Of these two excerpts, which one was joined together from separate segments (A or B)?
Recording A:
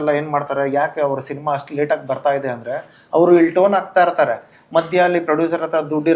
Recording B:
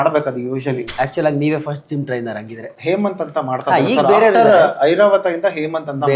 B